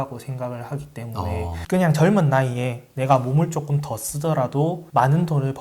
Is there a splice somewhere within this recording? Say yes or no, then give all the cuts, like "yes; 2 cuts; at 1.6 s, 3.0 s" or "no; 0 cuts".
yes; 1 cut; at 1.6 s